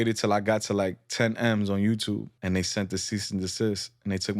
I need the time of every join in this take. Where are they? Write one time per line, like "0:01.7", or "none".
0:02.3